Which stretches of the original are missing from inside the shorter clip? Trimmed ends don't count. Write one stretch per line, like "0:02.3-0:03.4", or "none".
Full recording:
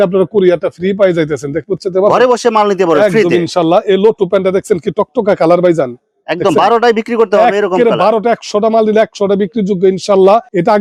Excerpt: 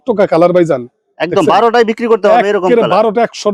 none